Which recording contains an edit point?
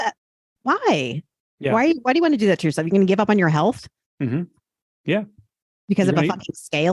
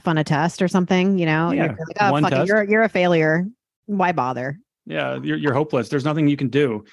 second; 1 cut; at 4.7 s

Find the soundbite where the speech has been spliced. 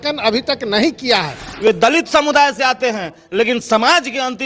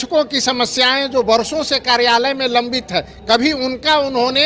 first; 1 cut; at 1.7 s

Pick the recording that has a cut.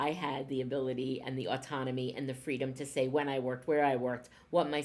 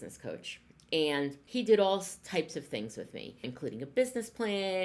second; 2 cuts; at 1.4 s, 3.4 s

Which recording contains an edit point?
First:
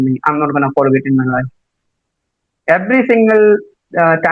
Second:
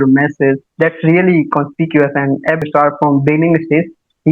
second; 1 cut; at 2.6 s

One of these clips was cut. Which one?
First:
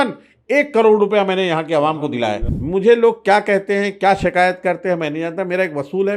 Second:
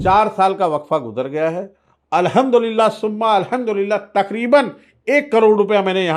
first; 1 cut; at 2.5 s

